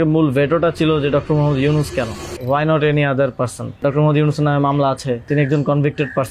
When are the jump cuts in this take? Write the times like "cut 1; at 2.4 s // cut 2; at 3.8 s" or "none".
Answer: cut 1; at 2.3 s // cut 2; at 3.8 s // cut 3; at 5.3 s

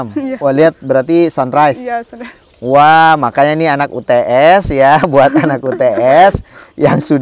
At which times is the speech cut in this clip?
none

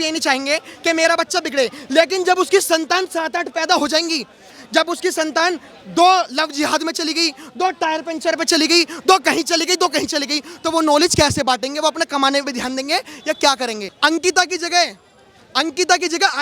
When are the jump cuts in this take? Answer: cut 1; at 13.8 s

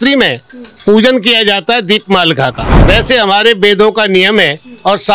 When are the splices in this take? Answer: cut 1; at 2.7 s

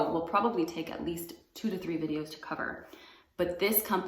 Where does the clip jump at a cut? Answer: none

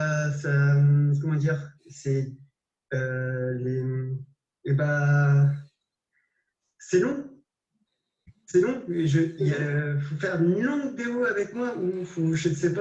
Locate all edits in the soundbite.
cut 1; at 8.9 s

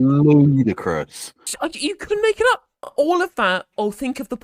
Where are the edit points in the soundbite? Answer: cut 1; at 1.5 s // cut 2; at 2.8 s

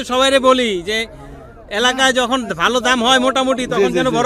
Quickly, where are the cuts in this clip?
none

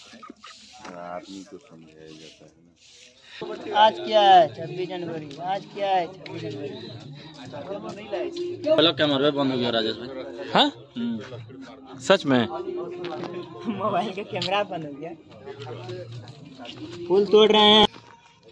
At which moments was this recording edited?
cut 1; at 3.4 s // cut 2; at 8.8 s

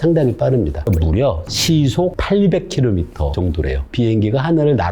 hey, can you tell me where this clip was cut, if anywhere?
cut 1; at 0.9 s // cut 2; at 2.2 s // cut 3; at 3.5 s

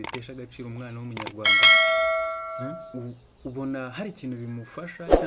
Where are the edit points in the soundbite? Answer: cut 1; at 1.5 s // cut 2; at 2.7 s // cut 3; at 4.6 s

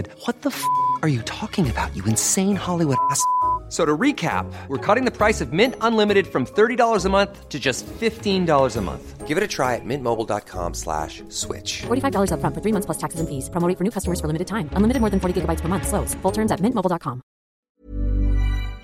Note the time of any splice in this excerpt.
cut 1; at 17.7 s

